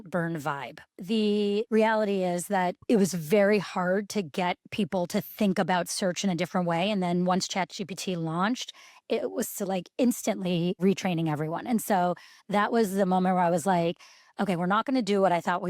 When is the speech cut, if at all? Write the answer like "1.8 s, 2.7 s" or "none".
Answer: 1.0 s